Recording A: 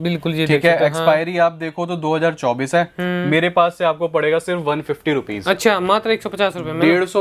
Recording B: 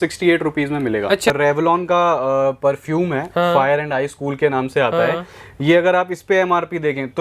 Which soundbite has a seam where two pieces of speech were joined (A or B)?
B